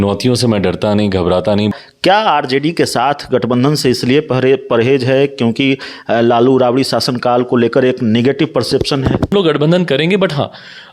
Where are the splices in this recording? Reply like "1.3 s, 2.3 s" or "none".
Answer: 1.7 s, 9.3 s